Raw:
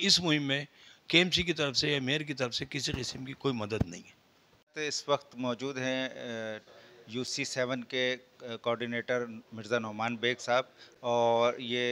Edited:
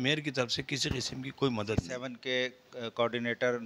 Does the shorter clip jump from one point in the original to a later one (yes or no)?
yes